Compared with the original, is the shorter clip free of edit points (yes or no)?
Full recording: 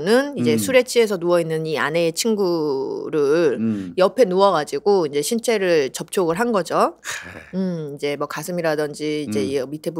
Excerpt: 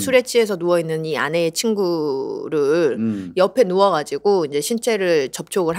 yes